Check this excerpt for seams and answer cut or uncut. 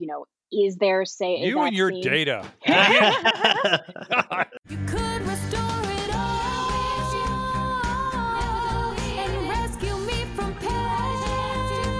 cut